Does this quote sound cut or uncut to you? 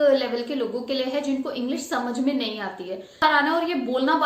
cut